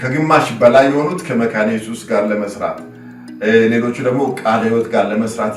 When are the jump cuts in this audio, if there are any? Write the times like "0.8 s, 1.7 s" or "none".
none